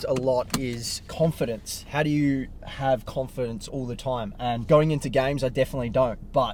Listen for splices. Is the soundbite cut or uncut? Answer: uncut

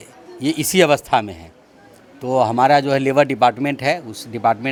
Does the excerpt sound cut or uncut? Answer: uncut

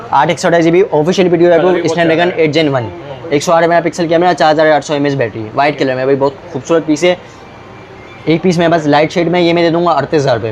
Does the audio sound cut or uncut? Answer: uncut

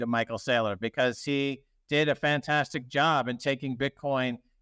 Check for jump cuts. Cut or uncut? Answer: uncut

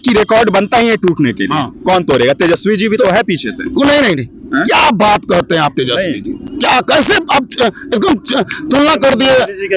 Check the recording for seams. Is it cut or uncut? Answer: uncut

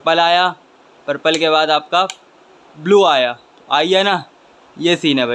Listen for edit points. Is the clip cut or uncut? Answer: uncut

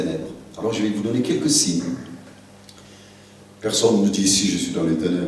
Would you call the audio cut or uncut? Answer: uncut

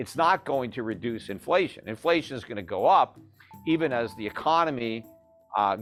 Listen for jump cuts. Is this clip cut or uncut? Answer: uncut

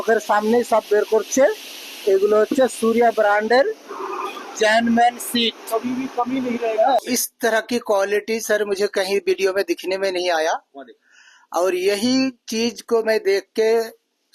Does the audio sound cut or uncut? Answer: cut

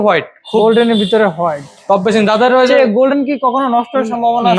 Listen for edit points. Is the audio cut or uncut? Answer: uncut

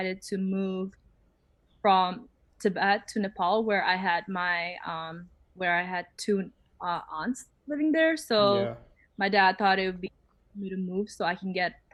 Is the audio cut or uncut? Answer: uncut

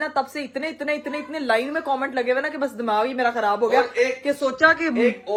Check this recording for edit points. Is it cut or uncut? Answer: uncut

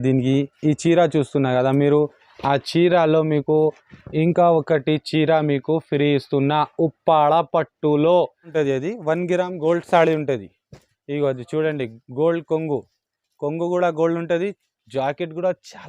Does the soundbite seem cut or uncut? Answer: cut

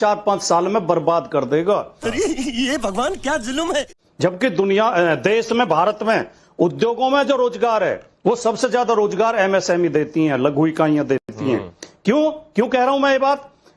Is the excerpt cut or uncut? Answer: uncut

